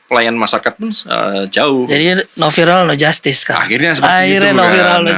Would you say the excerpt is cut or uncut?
uncut